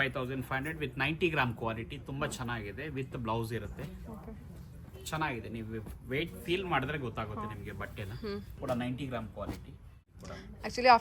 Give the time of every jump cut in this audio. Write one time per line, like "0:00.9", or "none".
0:08.6
0:10.2

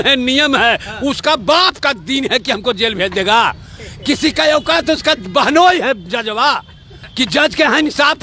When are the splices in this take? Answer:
none

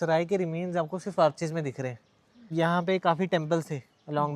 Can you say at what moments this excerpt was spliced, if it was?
0:02.5

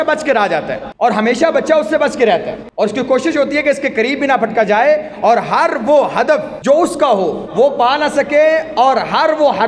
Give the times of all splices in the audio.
none

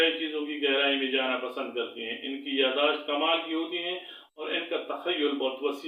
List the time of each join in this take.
none

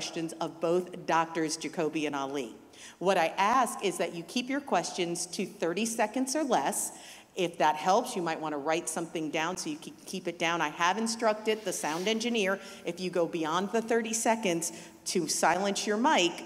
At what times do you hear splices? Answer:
none

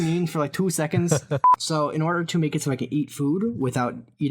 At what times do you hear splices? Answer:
0:01.4

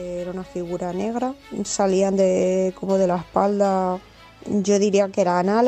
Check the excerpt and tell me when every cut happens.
0:01.5

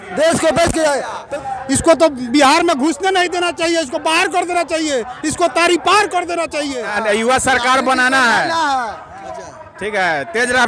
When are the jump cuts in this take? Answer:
0:01.2
0:06.9

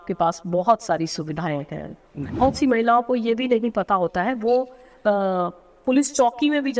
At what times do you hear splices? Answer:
0:02.2

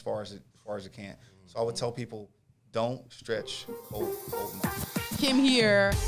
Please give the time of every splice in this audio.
0:04.0

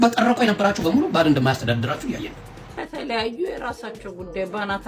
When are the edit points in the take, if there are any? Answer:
0:02.6

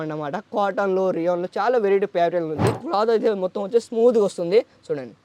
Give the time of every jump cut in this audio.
0:02.8

